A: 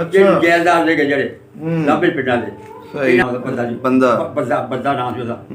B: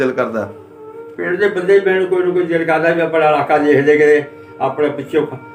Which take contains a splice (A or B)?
A